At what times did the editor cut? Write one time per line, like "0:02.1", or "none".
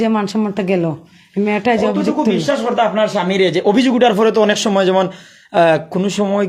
none